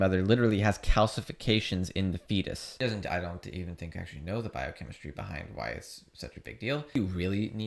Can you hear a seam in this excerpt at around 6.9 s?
yes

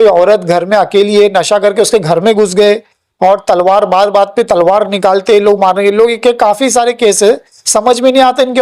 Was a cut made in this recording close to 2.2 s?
no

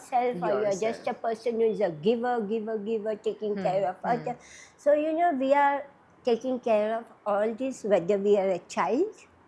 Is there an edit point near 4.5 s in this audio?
no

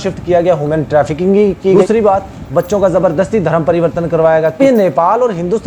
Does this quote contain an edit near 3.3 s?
no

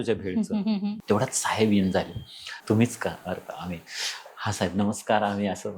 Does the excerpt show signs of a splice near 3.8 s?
no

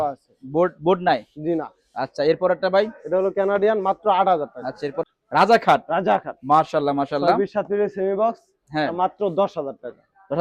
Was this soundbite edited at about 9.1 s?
no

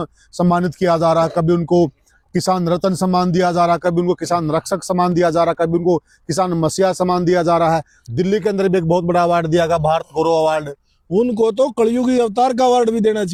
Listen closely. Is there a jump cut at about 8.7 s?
no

